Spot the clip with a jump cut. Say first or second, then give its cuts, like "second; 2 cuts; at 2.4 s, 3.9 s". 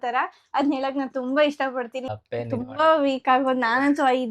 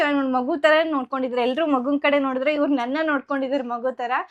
first; 1 cut; at 2.2 s